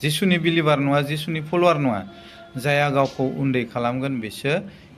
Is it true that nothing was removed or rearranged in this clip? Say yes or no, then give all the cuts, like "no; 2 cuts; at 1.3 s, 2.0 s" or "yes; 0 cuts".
yes; 0 cuts